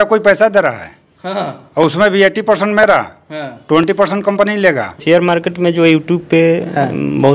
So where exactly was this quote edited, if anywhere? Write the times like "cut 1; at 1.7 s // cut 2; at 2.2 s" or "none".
none